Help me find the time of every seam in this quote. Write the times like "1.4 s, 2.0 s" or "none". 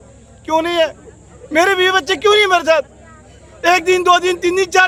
none